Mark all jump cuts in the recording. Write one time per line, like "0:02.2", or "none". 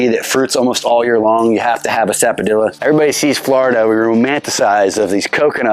0:02.8

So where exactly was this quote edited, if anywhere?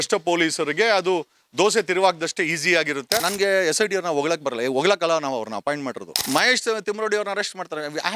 0:03.3
0:06.1

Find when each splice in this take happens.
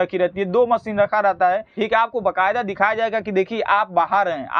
0:01.7

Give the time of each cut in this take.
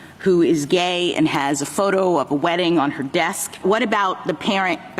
0:03.5

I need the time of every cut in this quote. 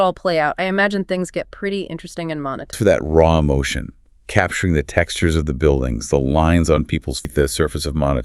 0:02.8
0:07.2

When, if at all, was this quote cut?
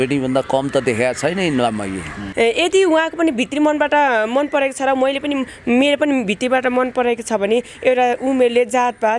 0:02.2

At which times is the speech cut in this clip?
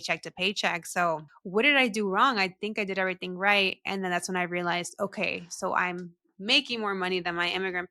0:01.3

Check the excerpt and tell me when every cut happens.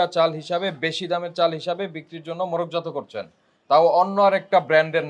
none

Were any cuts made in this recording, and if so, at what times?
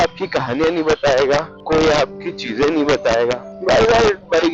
0:01.5
0:03.5

